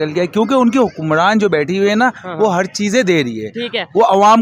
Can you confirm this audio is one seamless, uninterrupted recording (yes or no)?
yes